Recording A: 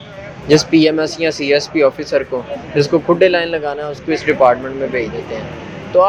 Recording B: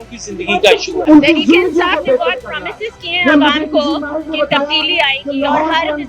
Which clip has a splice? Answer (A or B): B